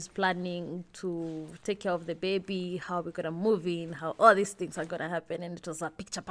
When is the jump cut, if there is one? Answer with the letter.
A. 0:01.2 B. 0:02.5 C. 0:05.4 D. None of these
D